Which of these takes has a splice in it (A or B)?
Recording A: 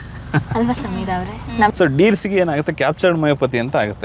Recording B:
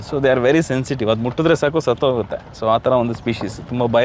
A